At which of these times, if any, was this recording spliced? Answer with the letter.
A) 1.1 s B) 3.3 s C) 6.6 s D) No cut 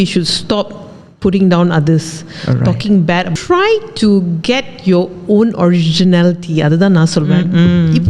B